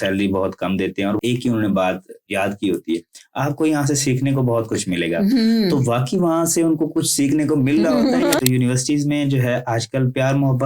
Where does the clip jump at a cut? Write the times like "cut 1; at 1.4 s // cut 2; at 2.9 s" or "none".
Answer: cut 1; at 1.2 s // cut 2; at 2.3 s // cut 3; at 8.4 s